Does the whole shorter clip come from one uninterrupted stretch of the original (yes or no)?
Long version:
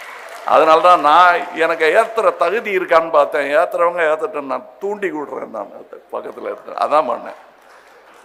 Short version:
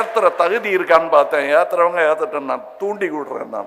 yes